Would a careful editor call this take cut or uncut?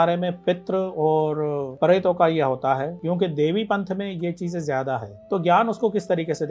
cut